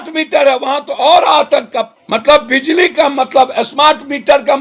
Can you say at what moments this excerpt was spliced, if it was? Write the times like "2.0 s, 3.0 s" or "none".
2.0 s

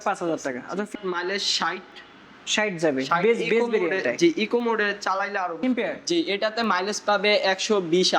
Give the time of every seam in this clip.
0.9 s, 5.6 s

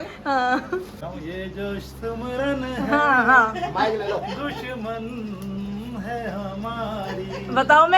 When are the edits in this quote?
1.1 s

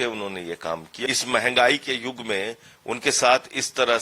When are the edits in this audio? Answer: 0.9 s

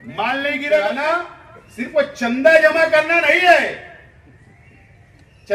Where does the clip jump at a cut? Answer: 1.1 s

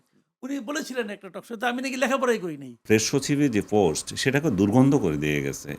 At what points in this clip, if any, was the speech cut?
2.8 s

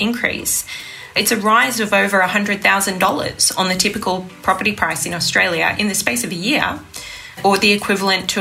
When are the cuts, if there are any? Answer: 1.2 s, 5.8 s, 7.4 s

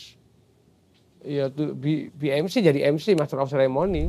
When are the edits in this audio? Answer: none

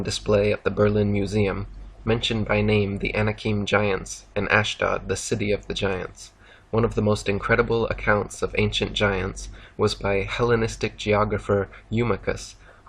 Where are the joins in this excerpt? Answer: 2.5 s

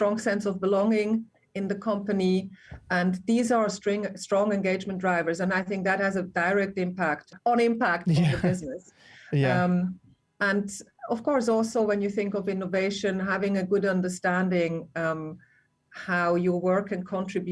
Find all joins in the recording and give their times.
7.3 s

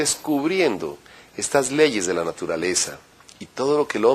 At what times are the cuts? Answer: 1.0 s

